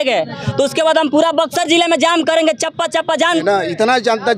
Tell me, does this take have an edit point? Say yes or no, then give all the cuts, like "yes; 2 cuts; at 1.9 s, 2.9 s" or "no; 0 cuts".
yes; 1 cut; at 3.4 s